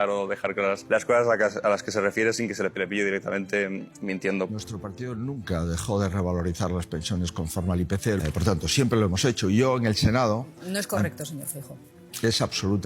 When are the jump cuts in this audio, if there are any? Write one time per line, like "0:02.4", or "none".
0:00.8
0:02.7
0:04.5
0:08.2